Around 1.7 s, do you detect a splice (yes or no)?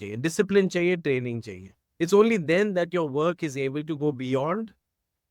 no